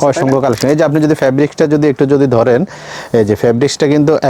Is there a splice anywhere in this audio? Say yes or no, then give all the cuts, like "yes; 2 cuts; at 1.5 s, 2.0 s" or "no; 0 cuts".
no; 0 cuts